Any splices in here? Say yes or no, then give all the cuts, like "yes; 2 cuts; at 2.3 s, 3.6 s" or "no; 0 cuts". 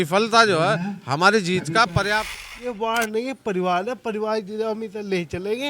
yes; 1 cut; at 2.2 s